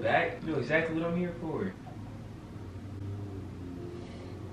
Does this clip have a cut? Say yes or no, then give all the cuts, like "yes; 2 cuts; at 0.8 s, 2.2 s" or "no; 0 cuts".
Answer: no; 0 cuts